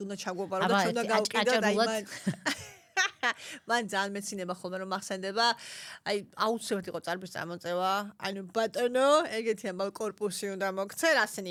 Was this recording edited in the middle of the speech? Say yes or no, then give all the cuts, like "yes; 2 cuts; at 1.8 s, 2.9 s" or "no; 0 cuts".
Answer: no; 0 cuts